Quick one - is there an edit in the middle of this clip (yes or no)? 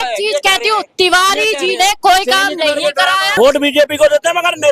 yes